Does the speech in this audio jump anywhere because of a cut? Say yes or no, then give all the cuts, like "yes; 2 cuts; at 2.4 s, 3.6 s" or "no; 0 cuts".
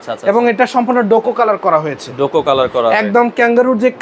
no; 0 cuts